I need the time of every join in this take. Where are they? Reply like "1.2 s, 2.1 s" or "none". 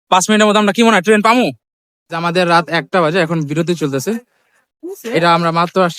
2.0 s